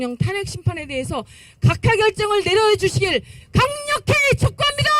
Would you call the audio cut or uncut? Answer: uncut